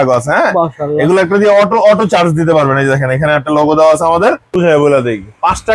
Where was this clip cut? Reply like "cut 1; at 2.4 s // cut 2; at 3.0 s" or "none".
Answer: cut 1; at 4.5 s

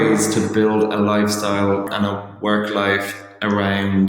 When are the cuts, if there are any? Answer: cut 1; at 1.8 s

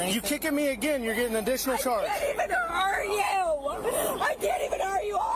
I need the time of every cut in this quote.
none

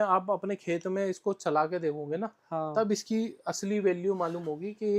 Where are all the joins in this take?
none

